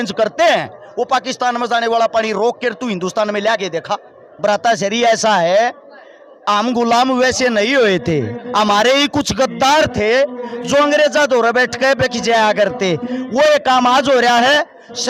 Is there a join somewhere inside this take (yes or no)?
yes